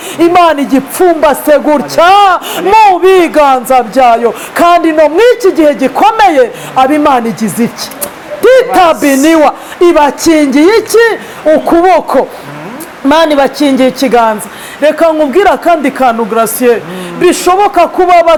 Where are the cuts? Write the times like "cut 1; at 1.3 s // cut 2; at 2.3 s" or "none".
none